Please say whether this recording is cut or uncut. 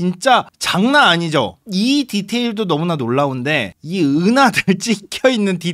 uncut